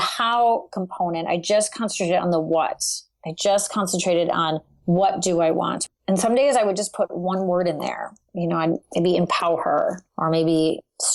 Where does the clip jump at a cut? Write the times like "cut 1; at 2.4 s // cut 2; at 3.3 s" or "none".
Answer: cut 1; at 5.8 s